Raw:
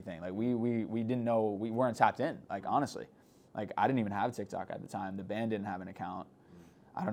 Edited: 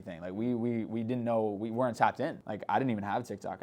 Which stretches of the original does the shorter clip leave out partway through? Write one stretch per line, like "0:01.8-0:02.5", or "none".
0:02.4-0:03.5